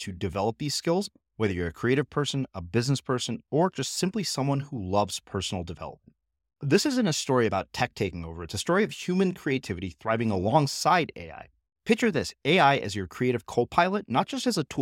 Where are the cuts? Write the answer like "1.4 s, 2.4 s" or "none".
none